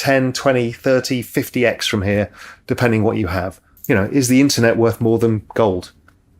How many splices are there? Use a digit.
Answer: 1